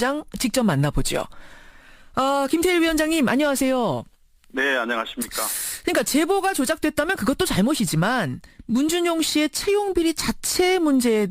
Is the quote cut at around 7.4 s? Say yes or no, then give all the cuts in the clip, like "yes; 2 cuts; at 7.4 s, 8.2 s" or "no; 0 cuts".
yes; 1 cut; at 7.4 s